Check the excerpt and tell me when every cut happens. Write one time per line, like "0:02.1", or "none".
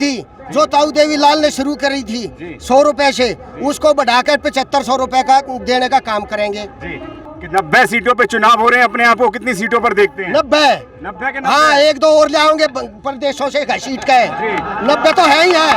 0:07.1

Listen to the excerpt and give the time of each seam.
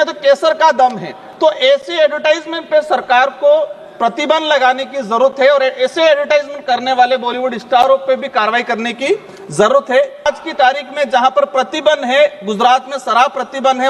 0:10.2

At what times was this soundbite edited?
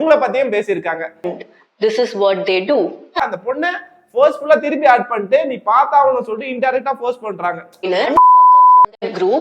0:01.4
0:03.2
0:07.9

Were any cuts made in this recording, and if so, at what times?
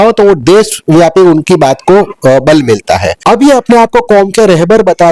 0:03.1

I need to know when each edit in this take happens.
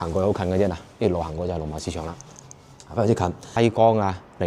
0:03.5

